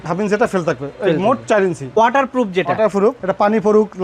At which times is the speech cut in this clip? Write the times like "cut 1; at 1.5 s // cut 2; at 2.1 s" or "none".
cut 1; at 2.0 s // cut 2; at 3.2 s